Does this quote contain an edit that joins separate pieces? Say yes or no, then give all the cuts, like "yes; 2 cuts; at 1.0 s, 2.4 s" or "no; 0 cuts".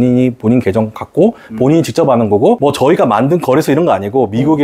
no; 0 cuts